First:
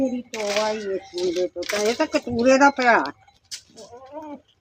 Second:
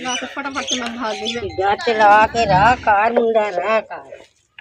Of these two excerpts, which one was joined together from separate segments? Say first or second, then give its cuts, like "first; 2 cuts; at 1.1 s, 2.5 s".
second; 1 cut; at 1.4 s